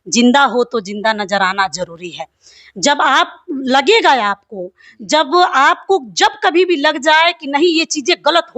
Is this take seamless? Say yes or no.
yes